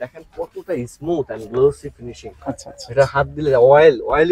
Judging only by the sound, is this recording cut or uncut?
uncut